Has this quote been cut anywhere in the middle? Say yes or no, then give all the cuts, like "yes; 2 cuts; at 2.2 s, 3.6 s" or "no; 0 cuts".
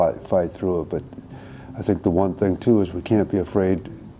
no; 0 cuts